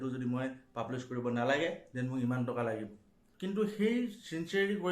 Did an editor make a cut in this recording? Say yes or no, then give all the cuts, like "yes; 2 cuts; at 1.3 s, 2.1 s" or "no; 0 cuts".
yes; 1 cut; at 3.3 s